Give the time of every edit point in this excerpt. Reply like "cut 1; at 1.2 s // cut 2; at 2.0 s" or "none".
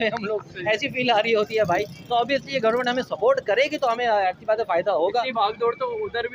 none